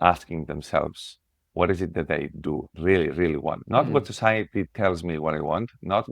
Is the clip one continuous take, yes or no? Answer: no